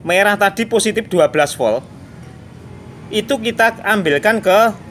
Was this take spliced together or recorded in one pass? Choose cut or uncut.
uncut